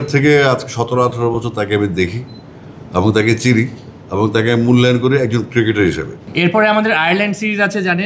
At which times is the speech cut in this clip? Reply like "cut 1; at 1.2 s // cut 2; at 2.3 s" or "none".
cut 1; at 6.2 s